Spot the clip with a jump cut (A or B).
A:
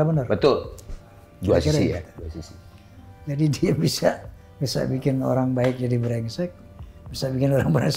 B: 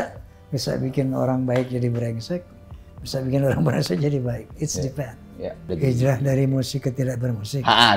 B